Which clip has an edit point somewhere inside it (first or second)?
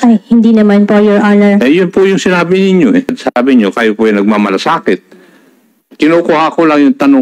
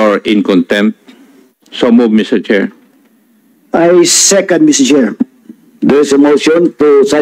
first